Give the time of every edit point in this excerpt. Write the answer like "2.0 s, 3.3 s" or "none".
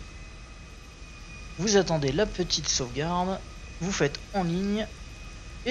2.3 s